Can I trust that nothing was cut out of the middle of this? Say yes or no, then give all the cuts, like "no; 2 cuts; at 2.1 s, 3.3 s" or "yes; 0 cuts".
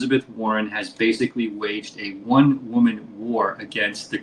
yes; 0 cuts